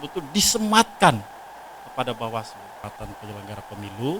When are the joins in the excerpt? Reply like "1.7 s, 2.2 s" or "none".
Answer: 2.9 s